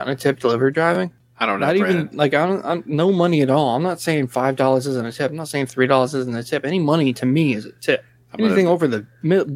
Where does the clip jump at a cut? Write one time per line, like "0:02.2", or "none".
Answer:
0:01.2